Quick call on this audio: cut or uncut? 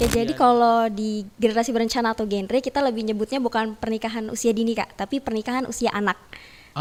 uncut